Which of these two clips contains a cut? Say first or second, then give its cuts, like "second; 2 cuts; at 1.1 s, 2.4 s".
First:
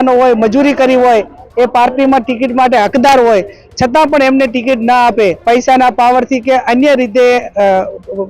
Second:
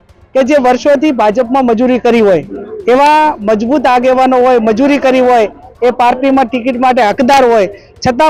first; 1 cut; at 5.4 s